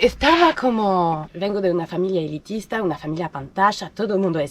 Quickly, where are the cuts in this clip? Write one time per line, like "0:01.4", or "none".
0:01.2